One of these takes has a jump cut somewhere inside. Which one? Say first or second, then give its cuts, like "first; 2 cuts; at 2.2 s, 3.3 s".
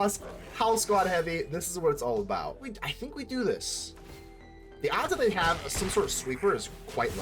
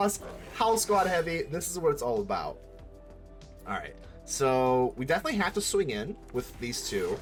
first; 1 cut; at 2.7 s